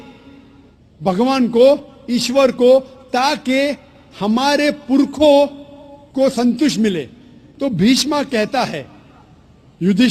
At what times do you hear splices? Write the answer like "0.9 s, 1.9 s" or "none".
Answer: none